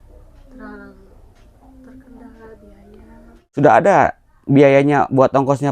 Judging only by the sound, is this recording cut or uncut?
cut